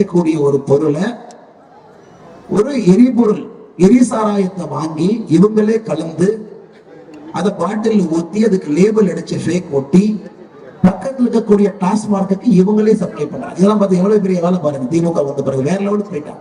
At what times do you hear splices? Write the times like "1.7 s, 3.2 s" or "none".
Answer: none